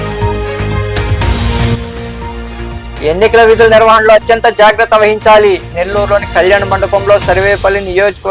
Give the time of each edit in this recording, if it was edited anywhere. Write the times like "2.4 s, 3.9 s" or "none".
1.1 s